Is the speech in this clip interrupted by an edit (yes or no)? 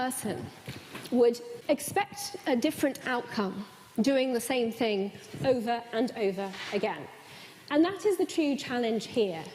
yes